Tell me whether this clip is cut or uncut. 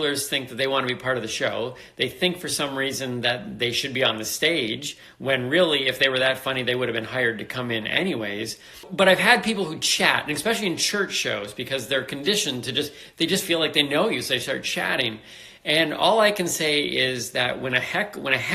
cut